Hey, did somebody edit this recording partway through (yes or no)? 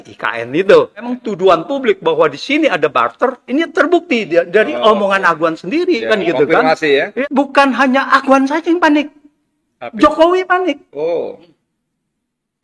yes